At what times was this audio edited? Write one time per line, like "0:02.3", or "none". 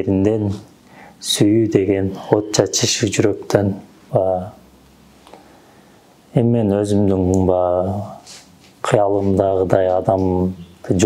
0:04.0